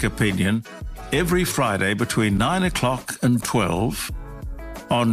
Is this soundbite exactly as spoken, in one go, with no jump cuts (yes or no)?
yes